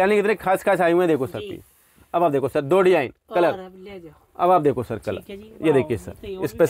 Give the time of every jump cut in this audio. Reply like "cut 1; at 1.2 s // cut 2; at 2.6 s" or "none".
none